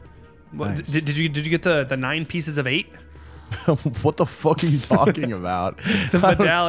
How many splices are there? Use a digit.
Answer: 0